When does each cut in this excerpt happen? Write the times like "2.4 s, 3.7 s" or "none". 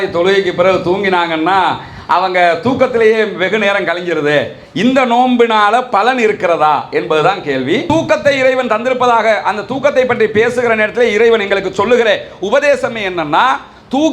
7.8 s